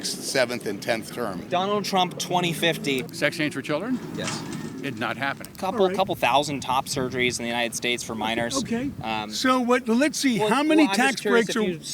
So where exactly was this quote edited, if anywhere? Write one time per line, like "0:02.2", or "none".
0:01.4
0:03.1
0:05.5